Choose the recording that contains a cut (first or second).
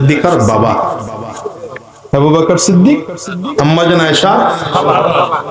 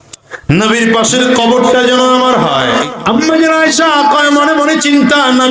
second